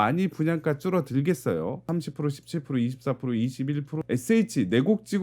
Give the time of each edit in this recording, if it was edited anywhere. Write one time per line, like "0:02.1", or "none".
0:01.9
0:04.0